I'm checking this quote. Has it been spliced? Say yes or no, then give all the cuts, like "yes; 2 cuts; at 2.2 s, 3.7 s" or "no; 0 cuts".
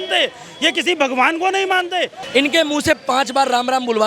yes; 1 cut; at 2.2 s